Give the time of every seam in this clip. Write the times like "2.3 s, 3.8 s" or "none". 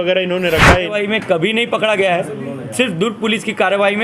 0.9 s